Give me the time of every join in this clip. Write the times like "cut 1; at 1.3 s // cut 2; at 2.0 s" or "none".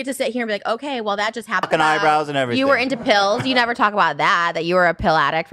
cut 1; at 1.7 s